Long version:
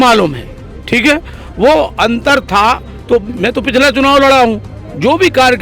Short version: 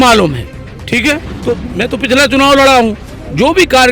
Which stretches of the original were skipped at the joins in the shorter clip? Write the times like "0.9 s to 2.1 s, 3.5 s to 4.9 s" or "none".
1.3 s to 2.9 s